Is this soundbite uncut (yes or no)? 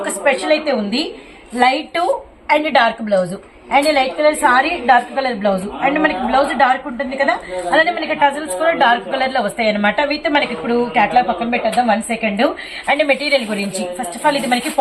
yes